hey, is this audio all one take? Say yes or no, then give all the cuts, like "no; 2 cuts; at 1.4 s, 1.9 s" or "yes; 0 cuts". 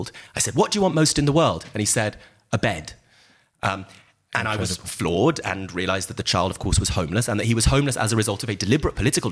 yes; 0 cuts